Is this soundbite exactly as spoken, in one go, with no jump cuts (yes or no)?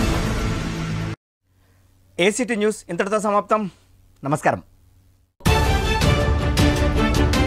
yes